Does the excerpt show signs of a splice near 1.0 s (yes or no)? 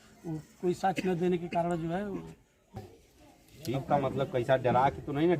no